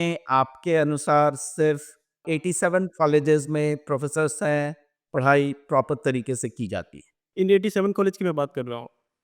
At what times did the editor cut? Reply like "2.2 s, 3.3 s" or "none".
2.2 s, 7.2 s